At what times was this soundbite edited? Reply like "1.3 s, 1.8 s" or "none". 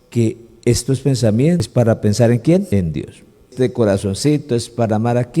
1.7 s

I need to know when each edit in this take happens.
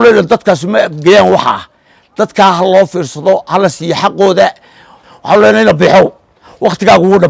4.6 s

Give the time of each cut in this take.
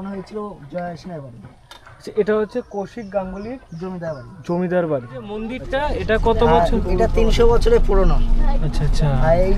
5.6 s

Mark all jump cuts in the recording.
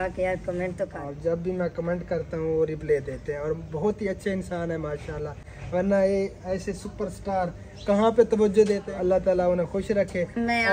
1.0 s, 8.8 s

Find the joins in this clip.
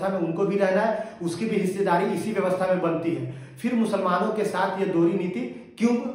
none

